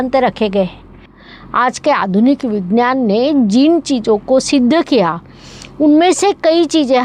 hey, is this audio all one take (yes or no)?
no